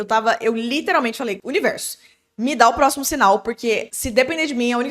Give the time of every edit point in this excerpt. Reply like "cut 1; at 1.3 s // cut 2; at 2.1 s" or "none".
cut 1; at 1.4 s // cut 2; at 4.0 s